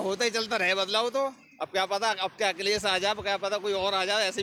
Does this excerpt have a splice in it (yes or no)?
no